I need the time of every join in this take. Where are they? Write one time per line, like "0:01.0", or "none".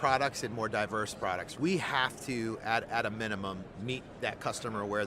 0:01.5